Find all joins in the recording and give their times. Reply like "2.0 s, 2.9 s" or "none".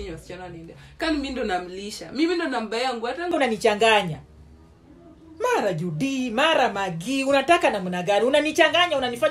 3.3 s